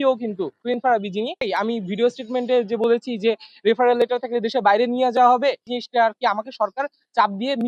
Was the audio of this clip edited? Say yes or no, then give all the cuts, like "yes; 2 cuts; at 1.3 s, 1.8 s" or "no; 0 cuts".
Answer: yes; 2 cuts; at 1.5 s, 5.7 s